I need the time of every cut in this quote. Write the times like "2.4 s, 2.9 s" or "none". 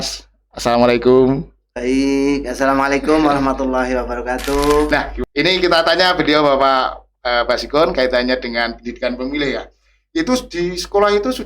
4.9 s